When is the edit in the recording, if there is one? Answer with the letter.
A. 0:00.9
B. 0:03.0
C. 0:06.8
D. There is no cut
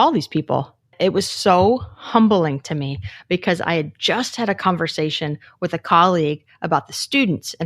A